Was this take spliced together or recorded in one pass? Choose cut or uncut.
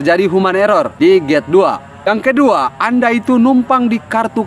cut